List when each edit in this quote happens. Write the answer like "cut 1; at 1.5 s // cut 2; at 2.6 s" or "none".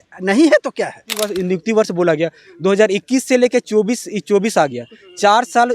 cut 1; at 1.2 s